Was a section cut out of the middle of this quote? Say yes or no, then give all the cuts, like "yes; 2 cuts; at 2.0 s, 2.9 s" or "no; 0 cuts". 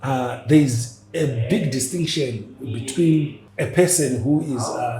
yes; 1 cut; at 3.4 s